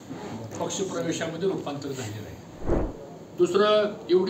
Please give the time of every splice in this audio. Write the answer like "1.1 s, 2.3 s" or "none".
2.8 s